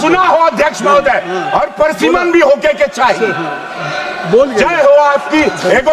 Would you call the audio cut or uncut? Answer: uncut